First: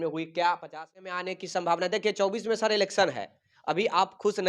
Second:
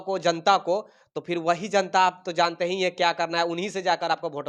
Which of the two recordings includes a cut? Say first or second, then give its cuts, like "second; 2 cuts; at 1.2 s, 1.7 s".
first; 1 cut; at 1.1 s